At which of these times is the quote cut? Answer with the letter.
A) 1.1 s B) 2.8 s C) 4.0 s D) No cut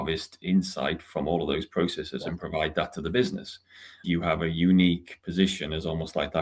C